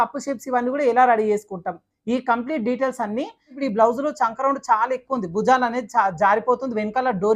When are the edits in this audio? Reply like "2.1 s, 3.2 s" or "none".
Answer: 3.5 s